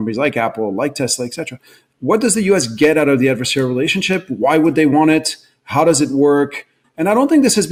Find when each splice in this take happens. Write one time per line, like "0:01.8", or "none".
none